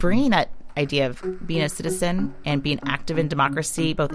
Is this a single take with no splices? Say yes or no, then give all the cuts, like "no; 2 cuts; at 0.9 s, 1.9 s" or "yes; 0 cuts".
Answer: no; 1 cut; at 2.3 s